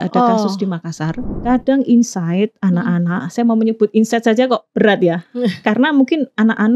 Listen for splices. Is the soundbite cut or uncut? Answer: cut